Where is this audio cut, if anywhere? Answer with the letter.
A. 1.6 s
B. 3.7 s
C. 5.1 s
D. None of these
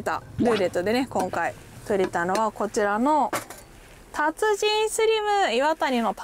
D